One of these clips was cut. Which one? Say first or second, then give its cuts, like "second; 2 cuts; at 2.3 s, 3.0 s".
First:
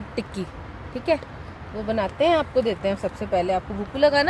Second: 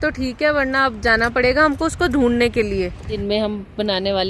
second; 1 cut; at 3.2 s